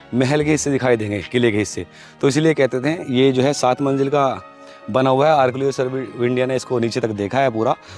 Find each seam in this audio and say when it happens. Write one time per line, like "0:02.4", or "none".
none